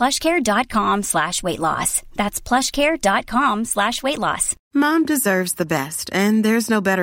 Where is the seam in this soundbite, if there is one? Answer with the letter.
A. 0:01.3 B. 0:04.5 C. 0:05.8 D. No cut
B